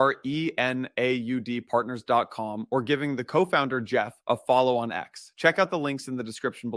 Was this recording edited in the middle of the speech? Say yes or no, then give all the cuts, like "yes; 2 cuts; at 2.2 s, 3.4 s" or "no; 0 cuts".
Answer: no; 0 cuts